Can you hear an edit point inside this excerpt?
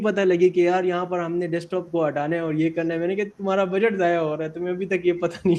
no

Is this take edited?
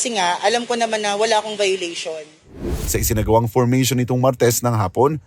yes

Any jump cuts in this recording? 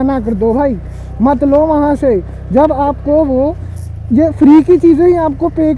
no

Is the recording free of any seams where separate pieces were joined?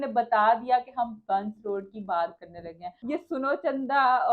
no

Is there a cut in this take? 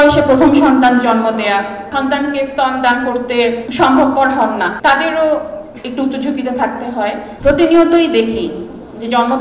yes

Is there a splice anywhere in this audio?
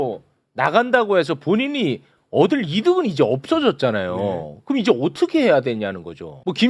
no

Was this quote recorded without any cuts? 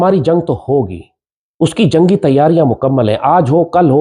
yes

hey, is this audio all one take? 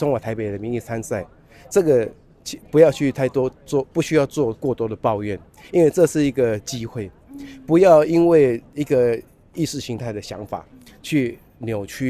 yes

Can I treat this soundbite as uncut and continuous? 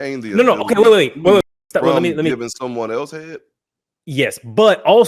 yes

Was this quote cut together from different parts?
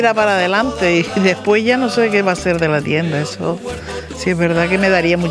no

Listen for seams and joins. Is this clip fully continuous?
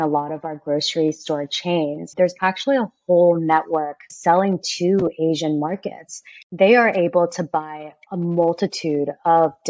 no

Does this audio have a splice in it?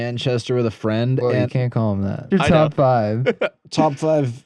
yes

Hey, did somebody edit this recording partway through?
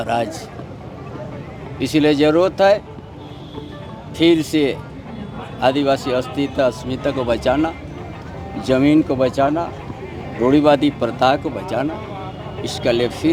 no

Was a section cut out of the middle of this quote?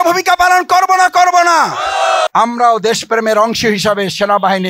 yes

